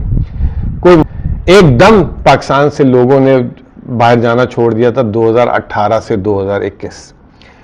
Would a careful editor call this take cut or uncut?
cut